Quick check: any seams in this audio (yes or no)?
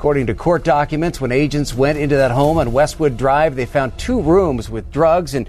no